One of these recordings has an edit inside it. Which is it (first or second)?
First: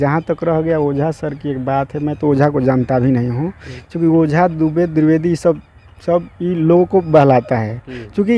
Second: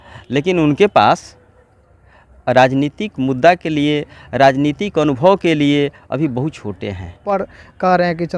second